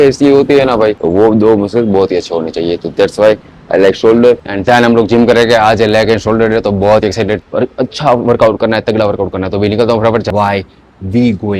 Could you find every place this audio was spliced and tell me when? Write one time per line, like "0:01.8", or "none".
0:01.0
0:04.5
0:07.4
0:10.3